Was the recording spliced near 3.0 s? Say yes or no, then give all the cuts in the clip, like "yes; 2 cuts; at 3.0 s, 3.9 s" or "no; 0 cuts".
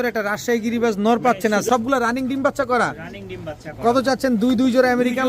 no; 1 cut; at 1.7 s